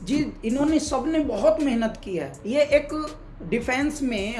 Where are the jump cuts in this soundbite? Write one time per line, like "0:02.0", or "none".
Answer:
0:02.3